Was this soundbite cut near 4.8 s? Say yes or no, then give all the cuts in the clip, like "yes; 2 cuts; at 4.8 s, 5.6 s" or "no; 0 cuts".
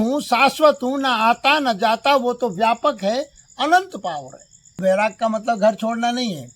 yes; 1 cut; at 4.8 s